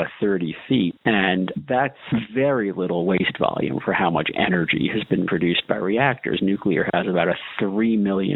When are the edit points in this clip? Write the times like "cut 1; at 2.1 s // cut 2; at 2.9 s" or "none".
none